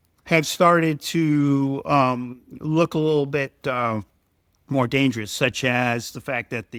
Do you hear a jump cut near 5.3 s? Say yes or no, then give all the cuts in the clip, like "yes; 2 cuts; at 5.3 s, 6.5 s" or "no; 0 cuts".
no; 0 cuts